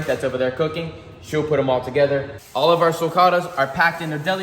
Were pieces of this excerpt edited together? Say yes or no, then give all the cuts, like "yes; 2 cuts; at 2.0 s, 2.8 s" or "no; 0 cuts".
yes; 1 cut; at 2.3 s